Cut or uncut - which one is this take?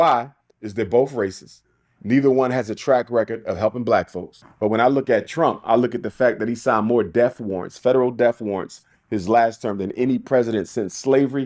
cut